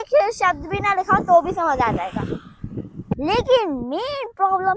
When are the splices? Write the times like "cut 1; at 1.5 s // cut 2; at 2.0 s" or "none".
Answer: cut 1; at 3.1 s